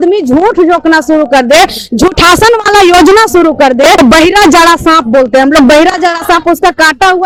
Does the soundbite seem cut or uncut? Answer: cut